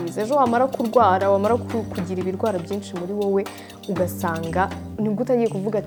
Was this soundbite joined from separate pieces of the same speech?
no; 0 cuts

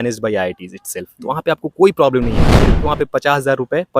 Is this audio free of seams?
no; 1 cut; at 2.7 s

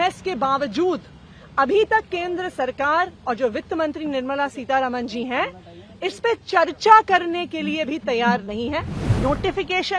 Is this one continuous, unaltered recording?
no; 1 cut; at 9.0 s

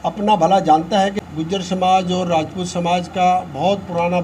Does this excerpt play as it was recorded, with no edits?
no; 1 cut; at 1.2 s

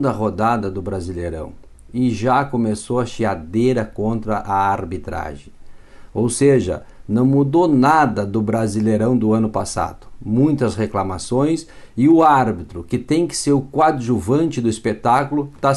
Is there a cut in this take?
no; 0 cuts

